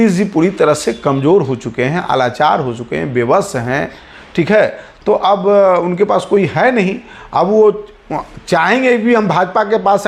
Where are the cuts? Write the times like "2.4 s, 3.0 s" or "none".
none